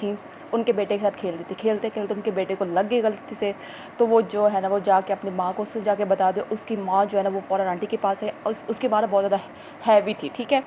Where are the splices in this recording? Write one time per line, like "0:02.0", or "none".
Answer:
none